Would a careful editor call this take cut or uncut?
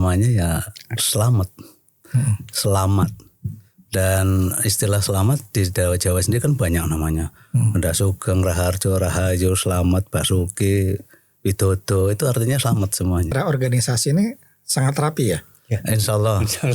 cut